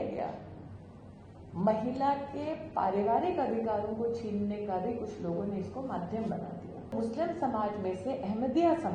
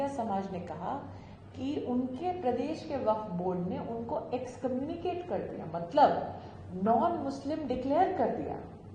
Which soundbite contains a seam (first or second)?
first